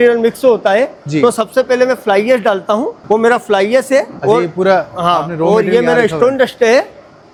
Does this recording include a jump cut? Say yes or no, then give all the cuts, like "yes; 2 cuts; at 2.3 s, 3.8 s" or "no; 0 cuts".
no; 0 cuts